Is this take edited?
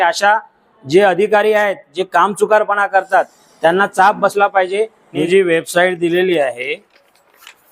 yes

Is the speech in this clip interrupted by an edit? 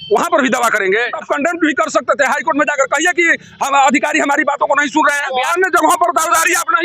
yes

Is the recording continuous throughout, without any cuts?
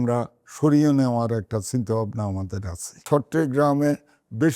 no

